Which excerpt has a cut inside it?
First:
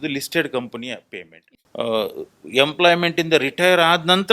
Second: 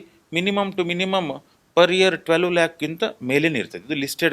first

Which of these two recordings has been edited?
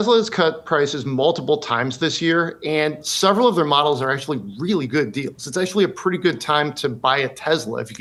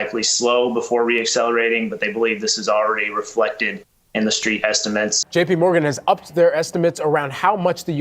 second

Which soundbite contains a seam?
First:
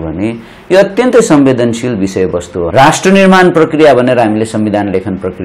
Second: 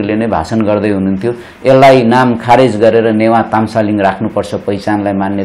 first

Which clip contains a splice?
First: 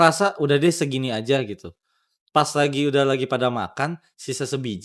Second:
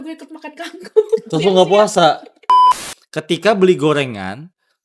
second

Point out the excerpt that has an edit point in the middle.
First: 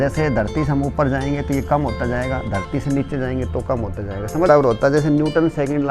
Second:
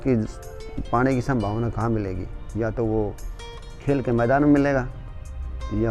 first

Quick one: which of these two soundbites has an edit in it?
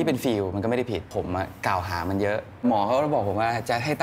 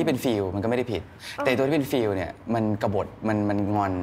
first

